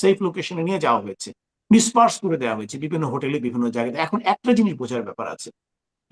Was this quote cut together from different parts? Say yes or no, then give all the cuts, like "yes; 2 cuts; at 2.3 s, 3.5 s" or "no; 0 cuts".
no; 0 cuts